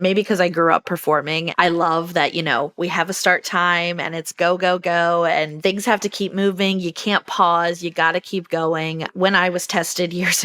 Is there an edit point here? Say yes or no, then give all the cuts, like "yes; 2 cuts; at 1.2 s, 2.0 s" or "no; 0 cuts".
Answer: yes; 2 cuts; at 1.4 s, 5.5 s